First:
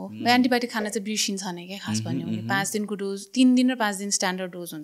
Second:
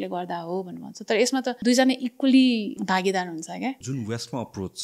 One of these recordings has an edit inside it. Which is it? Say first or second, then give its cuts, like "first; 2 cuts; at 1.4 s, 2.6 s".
second; 3 cuts; at 1.6 s, 2.8 s, 3.8 s